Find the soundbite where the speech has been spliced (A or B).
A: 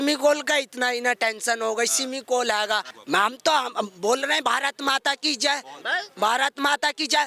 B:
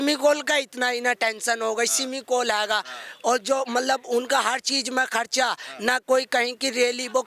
A